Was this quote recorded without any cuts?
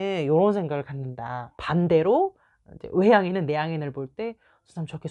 yes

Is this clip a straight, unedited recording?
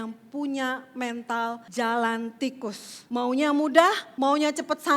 no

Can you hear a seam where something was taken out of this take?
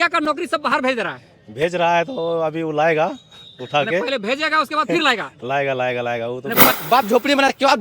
yes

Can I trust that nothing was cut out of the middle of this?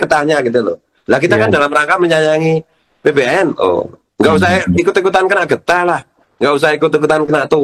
yes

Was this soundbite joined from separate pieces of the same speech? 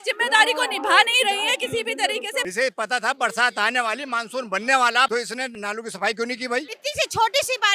yes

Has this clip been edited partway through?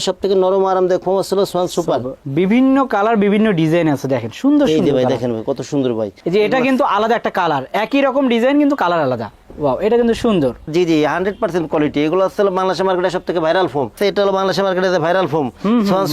yes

